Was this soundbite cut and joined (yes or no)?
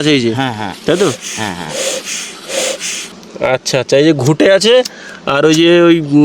yes